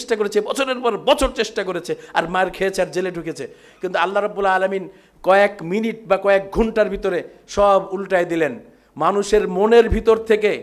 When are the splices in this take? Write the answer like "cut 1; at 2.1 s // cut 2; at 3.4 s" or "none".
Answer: none

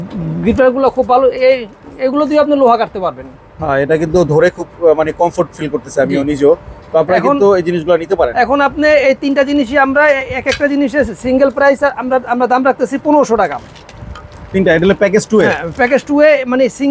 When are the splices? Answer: none

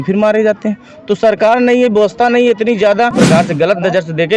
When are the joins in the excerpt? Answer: cut 1; at 3.2 s

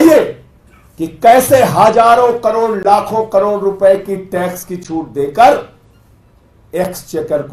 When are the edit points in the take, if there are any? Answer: none

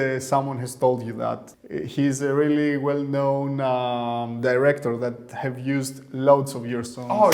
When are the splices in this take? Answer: cut 1; at 1.5 s

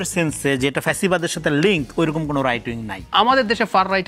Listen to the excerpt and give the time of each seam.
cut 1; at 3.1 s

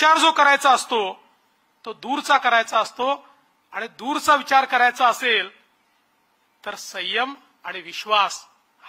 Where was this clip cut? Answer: none

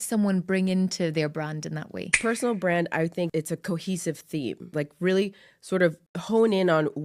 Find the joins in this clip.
cut 1; at 2.1 s // cut 2; at 3.3 s // cut 3; at 4.7 s // cut 4; at 6.1 s

